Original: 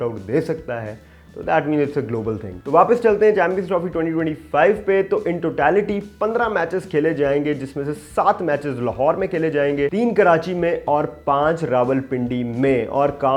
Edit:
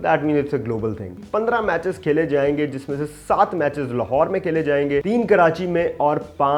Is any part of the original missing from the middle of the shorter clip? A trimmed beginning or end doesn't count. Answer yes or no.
yes